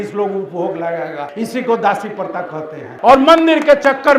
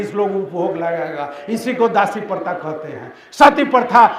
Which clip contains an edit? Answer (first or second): first